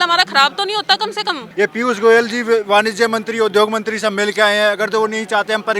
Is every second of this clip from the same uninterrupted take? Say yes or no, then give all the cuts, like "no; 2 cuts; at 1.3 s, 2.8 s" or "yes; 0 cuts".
no; 1 cut; at 1.4 s